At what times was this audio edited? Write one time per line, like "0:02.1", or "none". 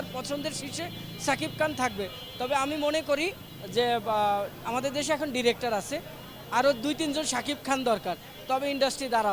none